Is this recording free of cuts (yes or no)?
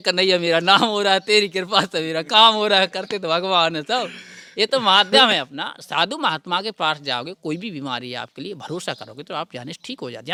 yes